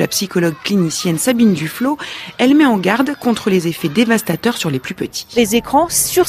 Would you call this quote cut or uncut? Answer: uncut